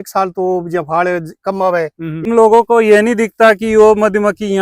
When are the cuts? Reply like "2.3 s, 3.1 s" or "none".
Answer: 2.2 s